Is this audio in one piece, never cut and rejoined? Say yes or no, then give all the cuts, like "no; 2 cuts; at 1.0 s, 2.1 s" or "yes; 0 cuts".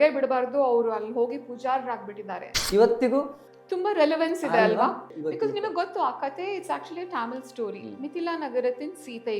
no; 1 cut; at 2.5 s